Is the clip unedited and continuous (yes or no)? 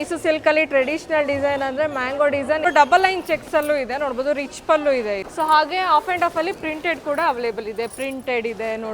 no